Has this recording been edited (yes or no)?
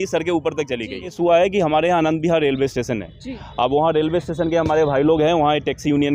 yes